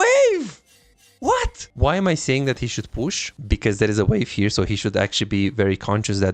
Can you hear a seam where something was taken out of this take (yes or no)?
yes